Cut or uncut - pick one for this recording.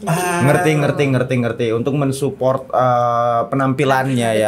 uncut